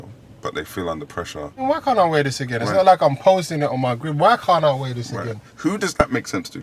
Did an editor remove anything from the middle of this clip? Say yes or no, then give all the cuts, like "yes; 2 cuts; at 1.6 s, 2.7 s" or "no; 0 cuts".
yes; 2 cuts; at 1.6 s, 5.5 s